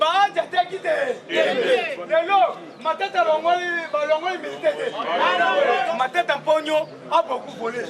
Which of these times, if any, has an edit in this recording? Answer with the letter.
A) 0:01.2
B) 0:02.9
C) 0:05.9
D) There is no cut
C